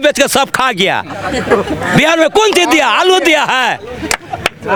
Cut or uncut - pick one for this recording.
uncut